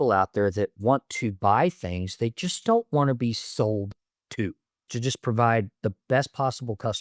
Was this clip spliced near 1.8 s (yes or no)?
no